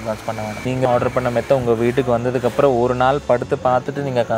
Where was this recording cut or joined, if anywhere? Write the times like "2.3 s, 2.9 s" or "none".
none